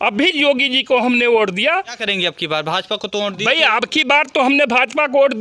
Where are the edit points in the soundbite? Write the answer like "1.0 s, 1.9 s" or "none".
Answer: 2.0 s